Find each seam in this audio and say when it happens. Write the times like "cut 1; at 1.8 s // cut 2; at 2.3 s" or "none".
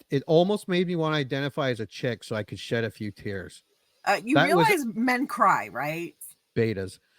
cut 1; at 6.2 s